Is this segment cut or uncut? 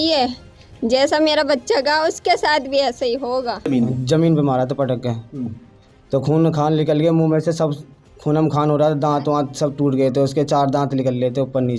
cut